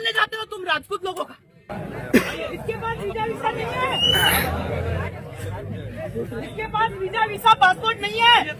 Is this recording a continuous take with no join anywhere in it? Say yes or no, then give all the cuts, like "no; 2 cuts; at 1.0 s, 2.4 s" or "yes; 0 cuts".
no; 1 cut; at 1.7 s